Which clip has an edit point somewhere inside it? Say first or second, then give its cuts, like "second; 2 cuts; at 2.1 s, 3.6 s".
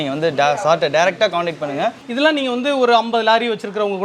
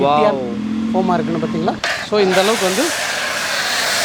first; 1 cut; at 2.0 s